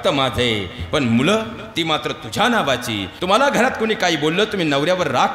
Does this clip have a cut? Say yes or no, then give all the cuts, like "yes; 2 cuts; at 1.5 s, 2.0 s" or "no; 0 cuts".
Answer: yes; 1 cut; at 3.1 s